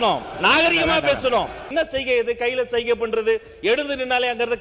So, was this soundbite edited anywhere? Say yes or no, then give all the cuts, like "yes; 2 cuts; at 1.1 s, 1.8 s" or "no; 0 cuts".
yes; 1 cut; at 1.7 s